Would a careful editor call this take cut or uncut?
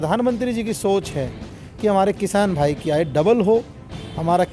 uncut